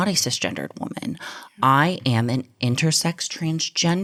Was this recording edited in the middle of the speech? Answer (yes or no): no